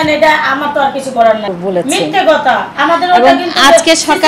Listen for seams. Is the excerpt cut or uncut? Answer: cut